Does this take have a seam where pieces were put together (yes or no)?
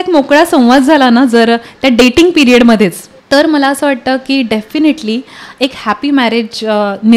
yes